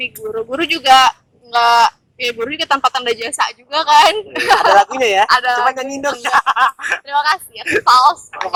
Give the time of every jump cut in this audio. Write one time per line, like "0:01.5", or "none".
none